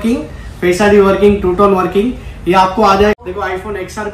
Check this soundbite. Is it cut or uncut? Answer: cut